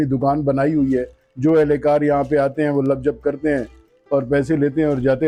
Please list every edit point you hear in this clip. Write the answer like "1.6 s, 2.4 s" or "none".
none